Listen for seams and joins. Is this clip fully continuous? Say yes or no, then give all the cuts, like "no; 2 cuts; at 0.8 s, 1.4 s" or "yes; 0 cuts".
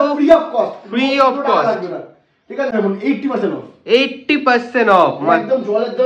no; 1 cut; at 2.7 s